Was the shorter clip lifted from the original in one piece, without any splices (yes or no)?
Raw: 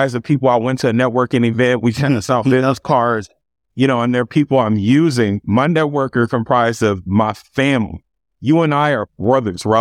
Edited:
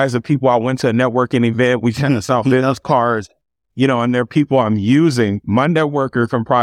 yes